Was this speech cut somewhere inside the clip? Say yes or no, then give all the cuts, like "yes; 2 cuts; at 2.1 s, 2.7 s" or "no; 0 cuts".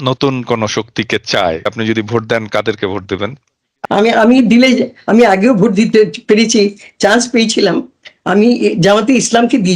yes; 2 cuts; at 1.7 s, 3.7 s